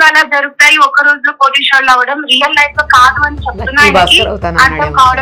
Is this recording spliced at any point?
no; 0 cuts

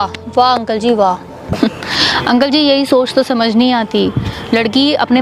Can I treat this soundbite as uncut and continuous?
no; 1 cut; at 1.5 s

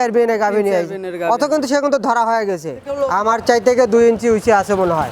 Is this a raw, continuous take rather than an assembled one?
no; 1 cut; at 3.0 s

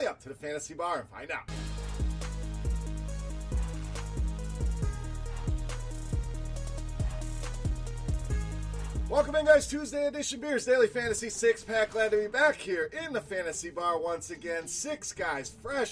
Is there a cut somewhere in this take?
no; 0 cuts

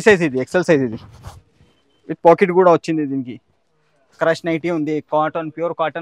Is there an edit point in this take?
no; 0 cuts

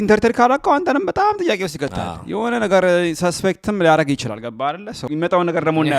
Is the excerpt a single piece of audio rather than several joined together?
no; 1 cut; at 5.0 s

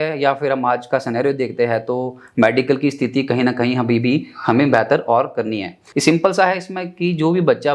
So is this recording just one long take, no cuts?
no; 1 cut; at 5.8 s

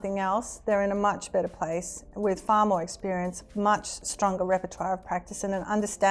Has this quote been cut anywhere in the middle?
no; 0 cuts

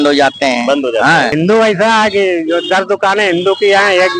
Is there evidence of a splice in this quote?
yes; 1 cut; at 1.3 s

